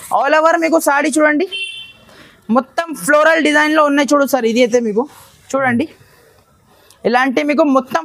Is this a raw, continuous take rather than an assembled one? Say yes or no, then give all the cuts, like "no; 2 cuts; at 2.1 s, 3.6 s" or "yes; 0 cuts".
yes; 0 cuts